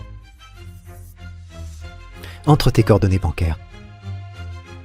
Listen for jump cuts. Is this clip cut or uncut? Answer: cut